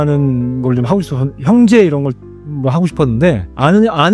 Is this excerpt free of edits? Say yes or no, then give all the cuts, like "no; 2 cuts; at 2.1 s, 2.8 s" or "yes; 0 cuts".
yes; 0 cuts